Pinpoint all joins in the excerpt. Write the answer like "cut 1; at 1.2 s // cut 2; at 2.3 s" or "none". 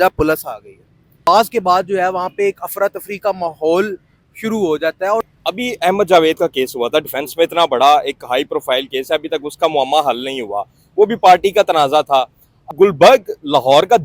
cut 1; at 1.3 s // cut 2; at 5.3 s // cut 3; at 12.6 s

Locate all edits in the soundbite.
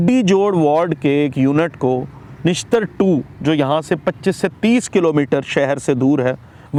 none

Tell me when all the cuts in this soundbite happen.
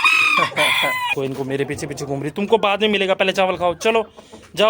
cut 1; at 1.1 s

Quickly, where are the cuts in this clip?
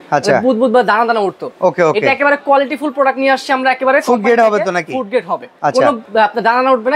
cut 1; at 5.8 s

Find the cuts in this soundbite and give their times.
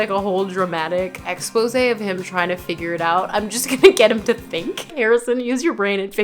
cut 1; at 1.3 s // cut 2; at 5.0 s

